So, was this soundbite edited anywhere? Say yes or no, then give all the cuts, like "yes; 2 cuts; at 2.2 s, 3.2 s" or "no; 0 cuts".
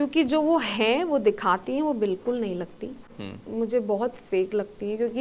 no; 0 cuts